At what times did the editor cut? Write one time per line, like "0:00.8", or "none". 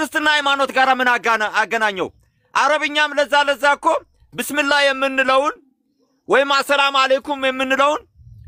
none